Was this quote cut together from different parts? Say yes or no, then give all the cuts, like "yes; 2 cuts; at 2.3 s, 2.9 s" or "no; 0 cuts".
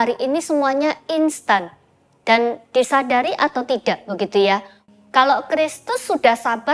yes; 1 cut; at 4.8 s